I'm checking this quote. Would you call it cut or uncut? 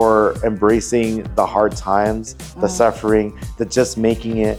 uncut